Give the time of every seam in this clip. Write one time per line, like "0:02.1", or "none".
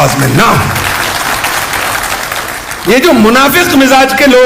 none